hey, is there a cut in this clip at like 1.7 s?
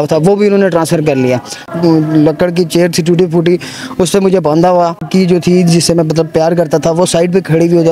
yes; 2 cuts; at 1.7 s, 5.1 s

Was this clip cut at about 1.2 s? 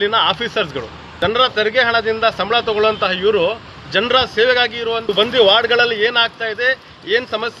yes; 2 cuts; at 1.2 s, 5.1 s

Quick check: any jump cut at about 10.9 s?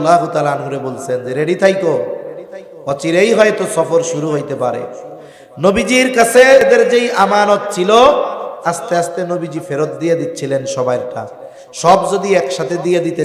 no; 1 cut; at 6.7 s

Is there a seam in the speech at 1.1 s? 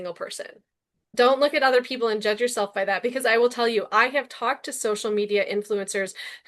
yes; 1 cut; at 1.1 s

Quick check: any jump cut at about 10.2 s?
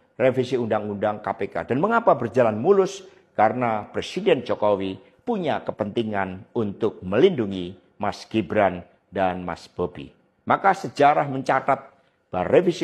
no; 0 cuts

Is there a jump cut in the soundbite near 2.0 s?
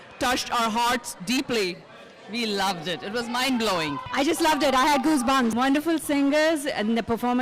no; 2 cuts; at 4.0 s, 5.5 s

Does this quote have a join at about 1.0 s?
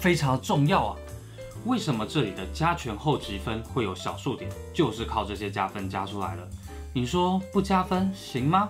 no; 0 cuts

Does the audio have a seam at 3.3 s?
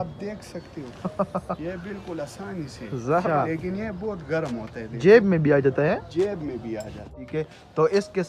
yes; 2 cuts; at 3.3 s, 7.1 s

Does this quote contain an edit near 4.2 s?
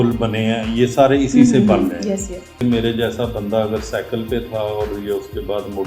no; 1 cut; at 2.6 s

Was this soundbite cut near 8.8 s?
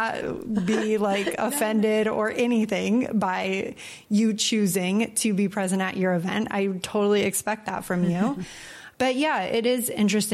yes; 1 cut; at 8.8 s

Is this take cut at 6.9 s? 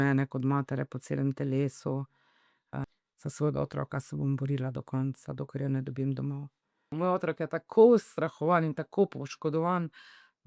yes; 2 cuts; at 2.8 s, 6.9 s

